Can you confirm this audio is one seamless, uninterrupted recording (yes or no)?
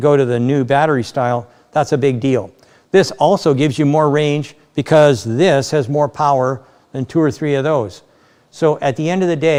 yes